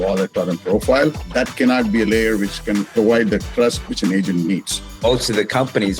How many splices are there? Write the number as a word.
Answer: three